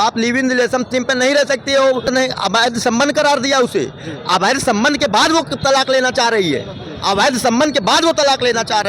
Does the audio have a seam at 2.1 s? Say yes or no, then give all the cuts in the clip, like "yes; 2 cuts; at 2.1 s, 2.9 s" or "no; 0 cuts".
yes; 1 cut; at 2.1 s